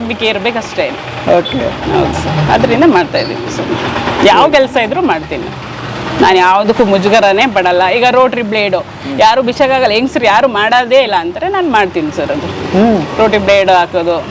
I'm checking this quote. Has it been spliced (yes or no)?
no